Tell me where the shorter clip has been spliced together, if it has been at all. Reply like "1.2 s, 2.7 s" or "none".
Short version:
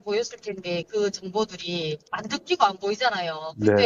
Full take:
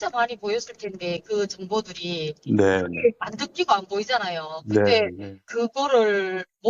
2.1 s